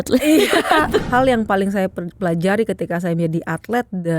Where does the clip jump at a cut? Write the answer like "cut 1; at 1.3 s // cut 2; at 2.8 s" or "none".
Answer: cut 1; at 1.0 s